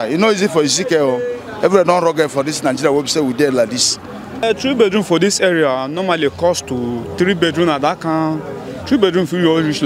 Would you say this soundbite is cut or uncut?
cut